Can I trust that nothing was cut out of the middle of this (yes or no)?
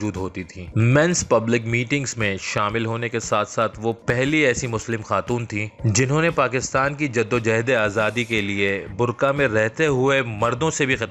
yes